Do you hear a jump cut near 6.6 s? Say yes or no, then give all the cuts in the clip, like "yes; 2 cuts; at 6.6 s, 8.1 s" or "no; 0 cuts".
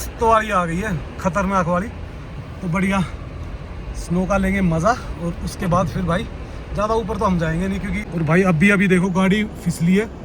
no; 1 cut; at 8.0 s